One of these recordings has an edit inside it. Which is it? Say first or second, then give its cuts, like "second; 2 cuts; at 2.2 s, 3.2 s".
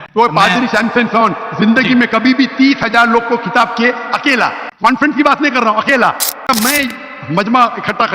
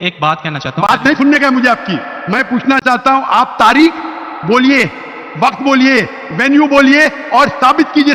first; 1 cut; at 6.4 s